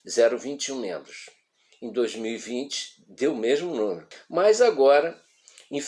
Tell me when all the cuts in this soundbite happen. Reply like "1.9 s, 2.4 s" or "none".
4.1 s